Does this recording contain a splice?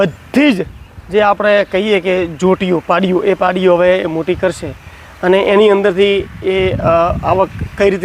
no; 0 cuts

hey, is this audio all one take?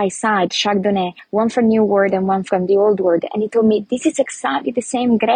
no; 1 cut; at 1.2 s

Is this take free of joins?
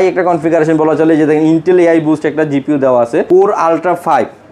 no; 1 cut; at 3.3 s

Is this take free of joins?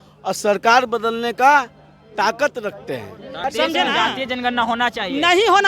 no; 1 cut; at 3.4 s

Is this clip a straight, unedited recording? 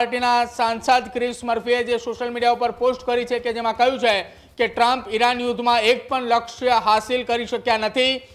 yes; 0 cuts

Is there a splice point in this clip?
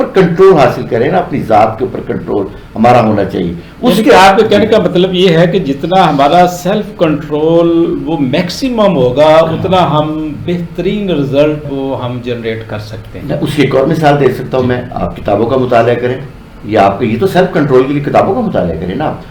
no; 0 cuts

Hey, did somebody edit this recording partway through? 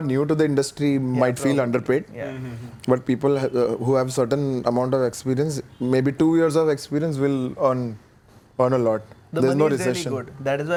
no; 0 cuts

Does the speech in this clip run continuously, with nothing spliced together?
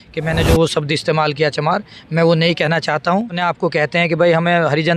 no; 1 cut; at 3.3 s

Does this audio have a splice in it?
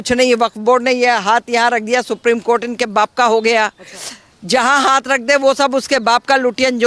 no; 0 cuts

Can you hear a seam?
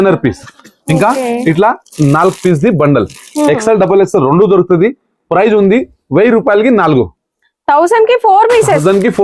no; 0 cuts

